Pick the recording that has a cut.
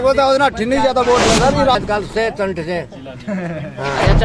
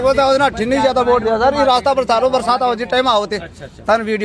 first; 1 cut; at 1.8 s

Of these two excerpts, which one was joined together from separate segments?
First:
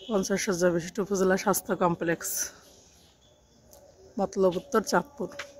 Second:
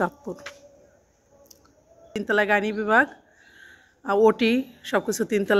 second; 1 cut; at 2.1 s

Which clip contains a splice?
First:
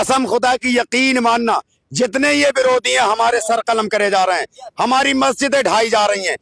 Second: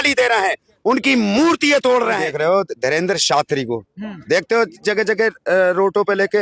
second; 1 cut; at 2.3 s

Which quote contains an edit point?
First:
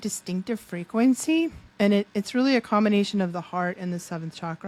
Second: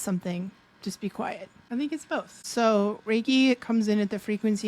second; 2 cuts; at 1.5 s, 2.4 s

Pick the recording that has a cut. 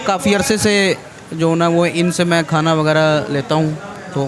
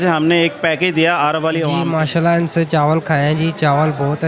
second; 1 cut; at 1.7 s

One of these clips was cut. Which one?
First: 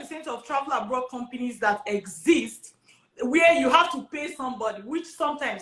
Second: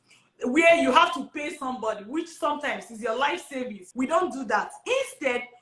second; 1 cut; at 3.8 s

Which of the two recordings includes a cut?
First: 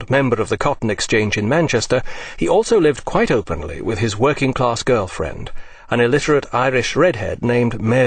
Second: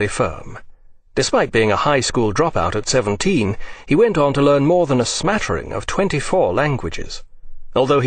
second; 1 cut; at 5.5 s

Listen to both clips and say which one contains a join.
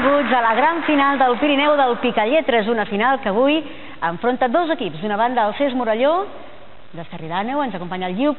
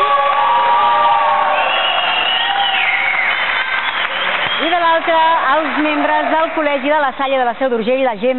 second; 1 cut; at 1.1 s

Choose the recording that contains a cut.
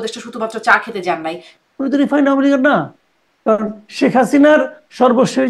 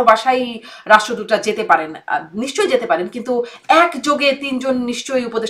first; 1 cut; at 1.5 s

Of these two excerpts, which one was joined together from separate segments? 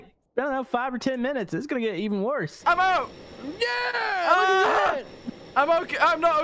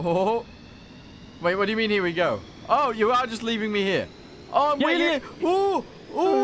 first; 1 cut; at 2.6 s

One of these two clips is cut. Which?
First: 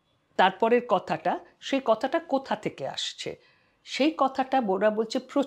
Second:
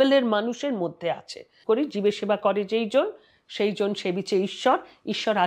second; 1 cut; at 1.6 s

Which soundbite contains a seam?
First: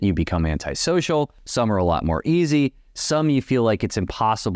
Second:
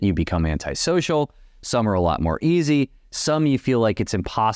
first; 1 cut; at 1.4 s

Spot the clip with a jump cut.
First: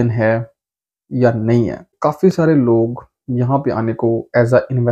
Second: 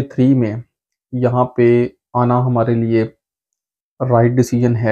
first; 1 cut; at 1.9 s

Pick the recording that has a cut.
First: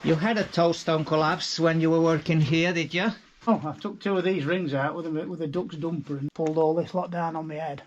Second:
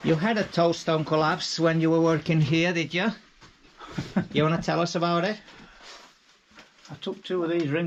first; 2 cuts; at 3.5 s, 6.3 s

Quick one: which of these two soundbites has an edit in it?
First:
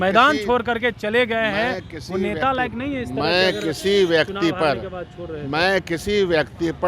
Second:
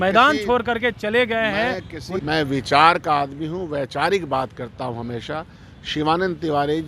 second; 1 cut; at 2.2 s

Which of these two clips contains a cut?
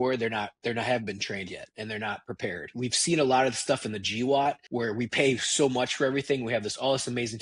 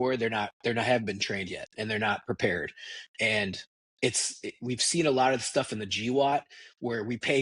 first; 2 cuts; at 2.7 s, 4.6 s

